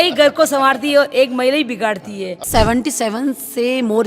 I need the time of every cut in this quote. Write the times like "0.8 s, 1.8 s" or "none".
2.4 s